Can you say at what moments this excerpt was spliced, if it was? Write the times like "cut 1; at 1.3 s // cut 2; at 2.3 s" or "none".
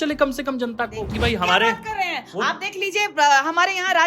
cut 1; at 1.1 s